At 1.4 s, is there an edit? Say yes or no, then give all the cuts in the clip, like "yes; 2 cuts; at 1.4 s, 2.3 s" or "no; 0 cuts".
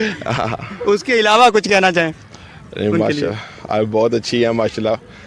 no; 0 cuts